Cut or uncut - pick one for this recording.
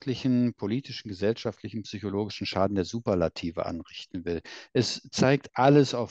uncut